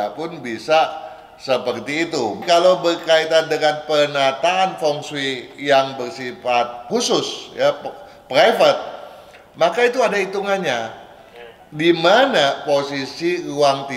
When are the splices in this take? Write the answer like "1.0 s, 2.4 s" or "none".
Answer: 2.4 s